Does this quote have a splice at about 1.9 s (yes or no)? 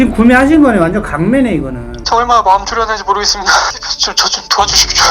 yes